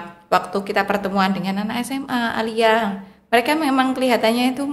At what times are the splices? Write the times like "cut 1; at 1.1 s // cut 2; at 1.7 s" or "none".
none